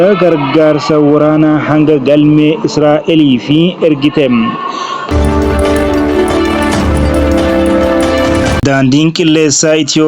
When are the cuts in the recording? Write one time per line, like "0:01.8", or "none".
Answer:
0:05.0
0:08.6

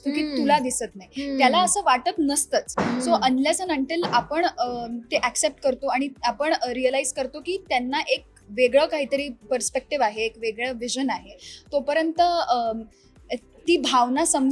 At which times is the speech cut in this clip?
none

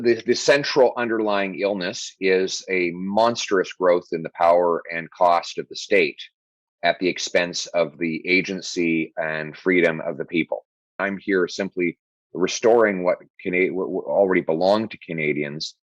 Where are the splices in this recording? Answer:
0:11.0

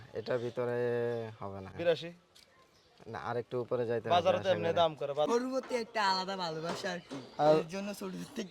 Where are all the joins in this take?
0:01.7
0:05.3

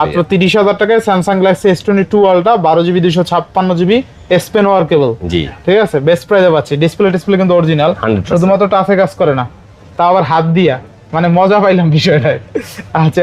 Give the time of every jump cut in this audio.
none

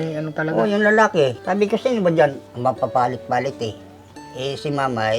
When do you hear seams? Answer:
0:01.4
0:02.5

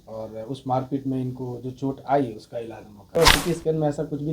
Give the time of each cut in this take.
0:03.2

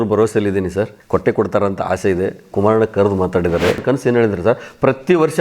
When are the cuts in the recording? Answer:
0:01.0
0:03.8

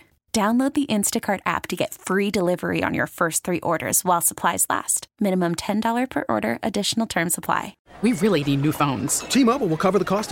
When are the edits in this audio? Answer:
0:07.8

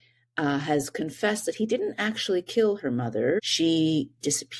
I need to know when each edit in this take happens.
0:03.4

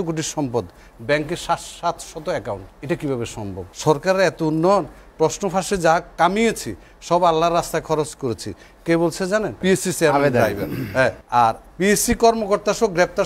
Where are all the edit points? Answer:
0:02.7
0:03.7
0:09.5
0:11.2

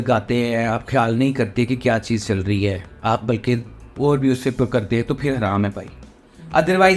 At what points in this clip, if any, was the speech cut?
none

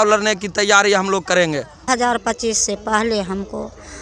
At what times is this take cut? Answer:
0:01.9

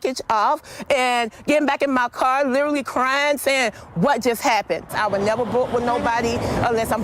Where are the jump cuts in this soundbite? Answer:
0:04.9

